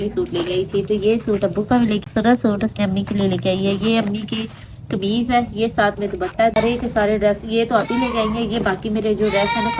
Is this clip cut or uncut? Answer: cut